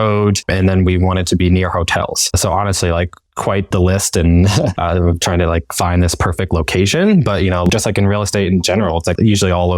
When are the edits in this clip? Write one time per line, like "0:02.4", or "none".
0:07.7